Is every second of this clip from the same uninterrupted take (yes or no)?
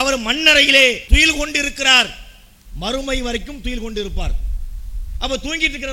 no